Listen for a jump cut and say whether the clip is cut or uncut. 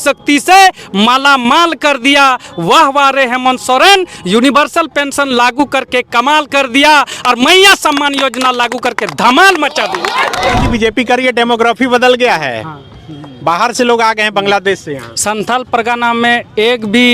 cut